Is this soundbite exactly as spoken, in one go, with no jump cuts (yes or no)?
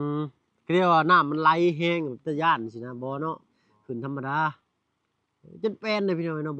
yes